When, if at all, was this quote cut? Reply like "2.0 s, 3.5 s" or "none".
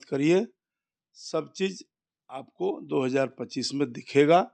none